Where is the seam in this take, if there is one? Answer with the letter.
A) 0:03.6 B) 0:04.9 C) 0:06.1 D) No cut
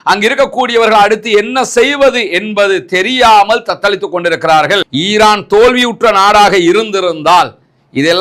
B